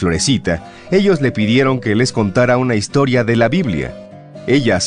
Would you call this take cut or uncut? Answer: uncut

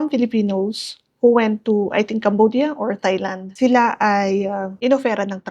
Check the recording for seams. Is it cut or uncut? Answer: cut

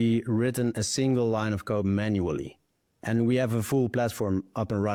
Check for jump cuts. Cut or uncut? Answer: uncut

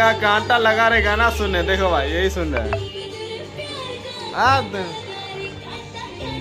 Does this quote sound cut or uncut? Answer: uncut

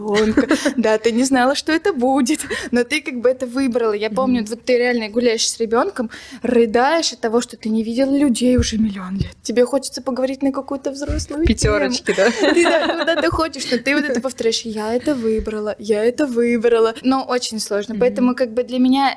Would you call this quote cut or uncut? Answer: uncut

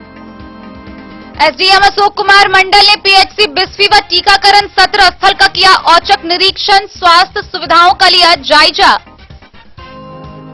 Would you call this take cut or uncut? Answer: cut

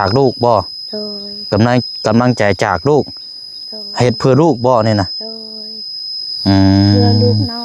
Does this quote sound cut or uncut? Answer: uncut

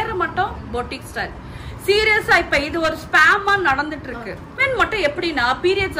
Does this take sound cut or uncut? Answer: cut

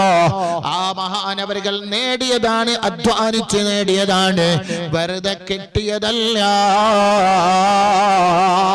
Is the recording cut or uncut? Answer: uncut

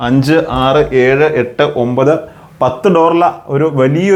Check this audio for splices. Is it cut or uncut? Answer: uncut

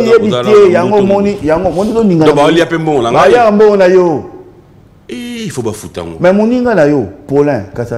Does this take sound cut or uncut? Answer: uncut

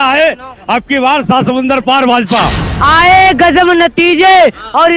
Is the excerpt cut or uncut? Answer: cut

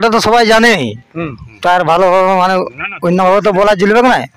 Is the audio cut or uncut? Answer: uncut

